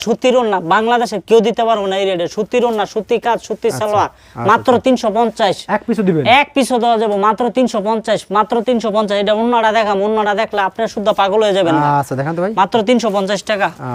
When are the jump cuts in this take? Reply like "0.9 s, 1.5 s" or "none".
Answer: none